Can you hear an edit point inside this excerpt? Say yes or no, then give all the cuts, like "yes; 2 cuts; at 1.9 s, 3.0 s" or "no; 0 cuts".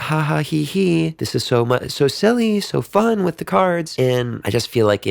yes; 2 cuts; at 1.2 s, 4.1 s